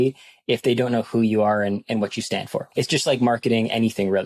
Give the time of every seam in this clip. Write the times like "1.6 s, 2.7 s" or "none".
2.7 s